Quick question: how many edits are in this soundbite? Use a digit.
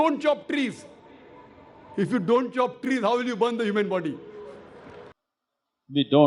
1